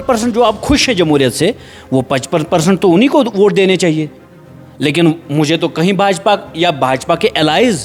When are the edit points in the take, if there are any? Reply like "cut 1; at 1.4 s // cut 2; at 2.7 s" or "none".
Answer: none